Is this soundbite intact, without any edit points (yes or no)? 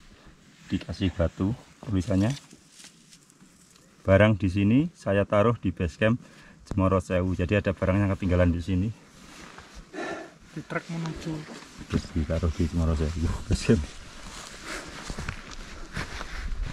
yes